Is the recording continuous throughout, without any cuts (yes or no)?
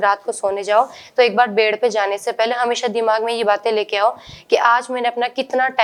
yes